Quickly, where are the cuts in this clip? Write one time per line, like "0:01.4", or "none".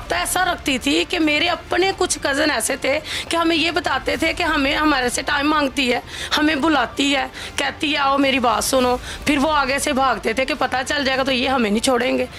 none